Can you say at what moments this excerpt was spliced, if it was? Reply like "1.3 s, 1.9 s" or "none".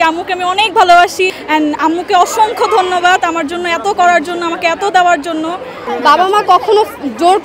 1.3 s, 5.7 s